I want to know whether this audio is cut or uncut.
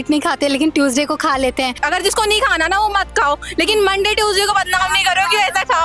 cut